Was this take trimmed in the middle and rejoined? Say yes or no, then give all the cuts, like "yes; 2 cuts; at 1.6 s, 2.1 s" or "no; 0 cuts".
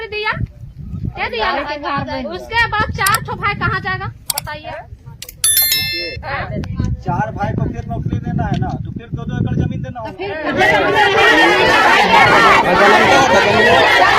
no; 0 cuts